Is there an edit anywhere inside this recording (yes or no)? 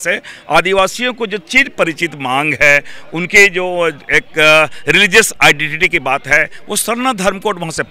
no